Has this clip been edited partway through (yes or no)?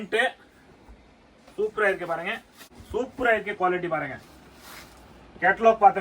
yes